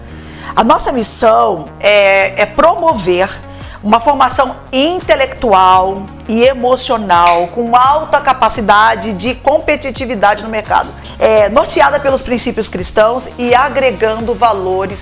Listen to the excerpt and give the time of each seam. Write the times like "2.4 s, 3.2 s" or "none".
11.0 s